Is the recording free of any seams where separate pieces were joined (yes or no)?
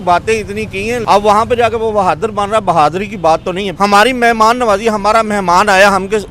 no